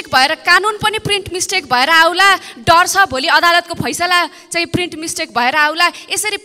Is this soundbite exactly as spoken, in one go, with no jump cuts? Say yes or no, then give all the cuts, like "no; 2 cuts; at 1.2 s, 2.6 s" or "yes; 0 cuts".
yes; 0 cuts